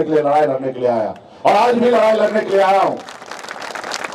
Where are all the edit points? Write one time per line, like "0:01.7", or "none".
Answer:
none